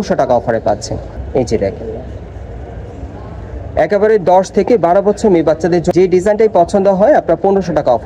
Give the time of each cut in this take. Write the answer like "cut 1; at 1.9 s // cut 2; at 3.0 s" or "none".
cut 1; at 1.1 s // cut 2; at 5.9 s